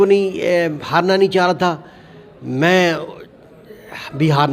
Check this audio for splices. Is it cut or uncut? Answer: uncut